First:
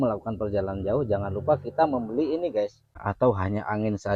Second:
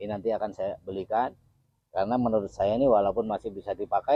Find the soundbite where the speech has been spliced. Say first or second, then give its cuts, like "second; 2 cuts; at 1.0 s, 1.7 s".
first; 1 cut; at 3.0 s